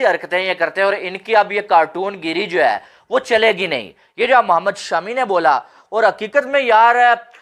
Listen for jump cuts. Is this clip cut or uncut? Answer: uncut